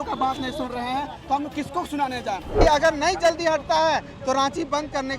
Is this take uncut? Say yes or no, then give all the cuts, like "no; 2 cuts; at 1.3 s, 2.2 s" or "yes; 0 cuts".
no; 1 cut; at 2.5 s